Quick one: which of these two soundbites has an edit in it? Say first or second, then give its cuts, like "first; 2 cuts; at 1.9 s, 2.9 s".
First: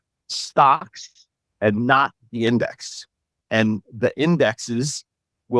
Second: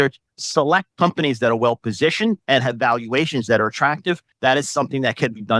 second; 3 cuts; at 0.9 s, 2.4 s, 4.3 s